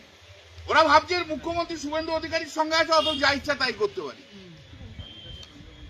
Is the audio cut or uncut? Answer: uncut